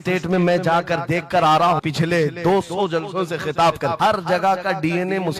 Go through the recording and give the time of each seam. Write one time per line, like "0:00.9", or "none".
0:01.8
0:04.0